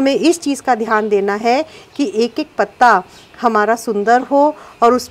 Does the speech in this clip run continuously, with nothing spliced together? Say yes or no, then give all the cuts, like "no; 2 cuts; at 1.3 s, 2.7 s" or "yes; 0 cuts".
yes; 0 cuts